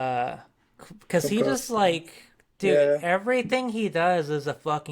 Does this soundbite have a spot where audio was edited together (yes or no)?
no